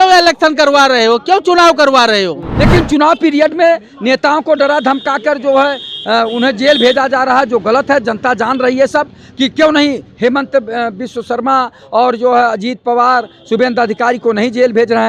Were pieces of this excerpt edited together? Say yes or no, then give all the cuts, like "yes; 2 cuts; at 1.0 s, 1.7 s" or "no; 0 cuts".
yes; 1 cut; at 2.4 s